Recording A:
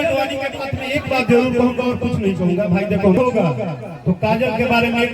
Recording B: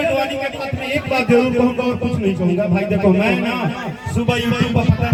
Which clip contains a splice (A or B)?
A